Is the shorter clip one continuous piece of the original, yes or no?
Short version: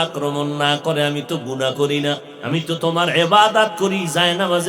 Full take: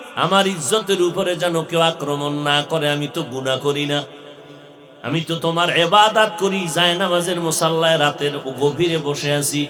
no